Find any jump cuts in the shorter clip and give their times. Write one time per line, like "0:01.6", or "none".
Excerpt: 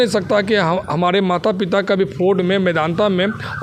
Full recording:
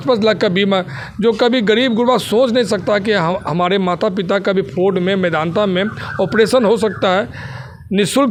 none